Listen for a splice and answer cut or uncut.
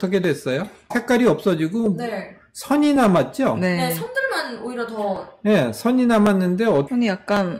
cut